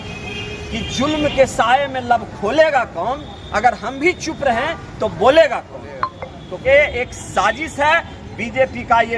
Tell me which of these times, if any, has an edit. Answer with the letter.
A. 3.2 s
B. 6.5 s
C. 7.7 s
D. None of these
B